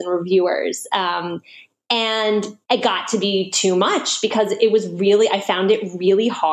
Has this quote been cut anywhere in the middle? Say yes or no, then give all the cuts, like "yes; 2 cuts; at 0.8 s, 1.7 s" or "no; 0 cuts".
yes; 1 cut; at 2.5 s